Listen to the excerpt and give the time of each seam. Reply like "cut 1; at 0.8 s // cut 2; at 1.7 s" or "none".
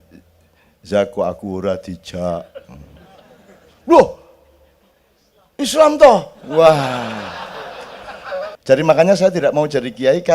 cut 1; at 8.5 s